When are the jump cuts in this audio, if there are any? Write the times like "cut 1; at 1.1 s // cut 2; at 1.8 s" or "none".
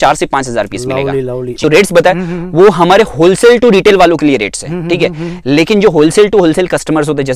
cut 1; at 1.6 s